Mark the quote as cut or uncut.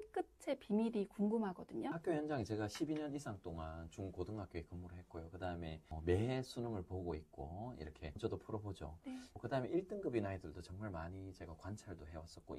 cut